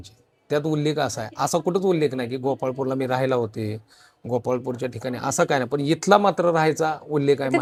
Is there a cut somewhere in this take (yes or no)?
no